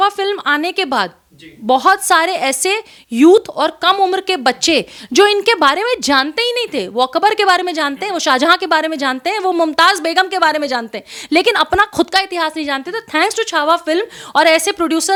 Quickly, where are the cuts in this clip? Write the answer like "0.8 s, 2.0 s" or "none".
none